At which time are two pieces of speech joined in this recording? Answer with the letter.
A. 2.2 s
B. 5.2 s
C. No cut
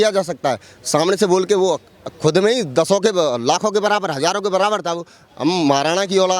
B